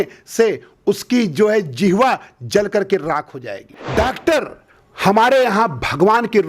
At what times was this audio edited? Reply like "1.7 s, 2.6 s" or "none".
3.8 s